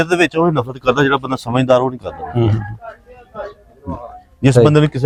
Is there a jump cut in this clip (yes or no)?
no